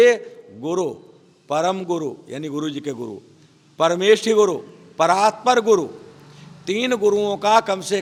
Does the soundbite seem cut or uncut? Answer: uncut